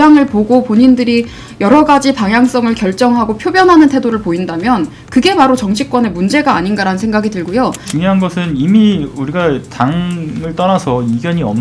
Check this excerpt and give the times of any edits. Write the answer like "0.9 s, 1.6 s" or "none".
7.8 s